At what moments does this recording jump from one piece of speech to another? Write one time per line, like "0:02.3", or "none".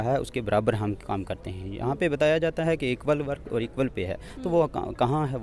none